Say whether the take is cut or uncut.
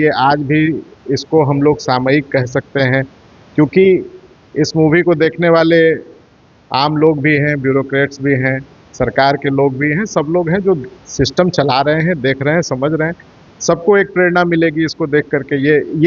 uncut